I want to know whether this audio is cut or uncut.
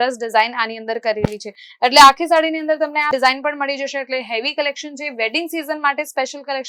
uncut